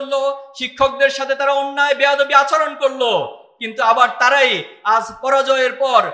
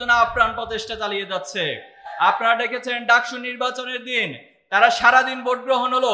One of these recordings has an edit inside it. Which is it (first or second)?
second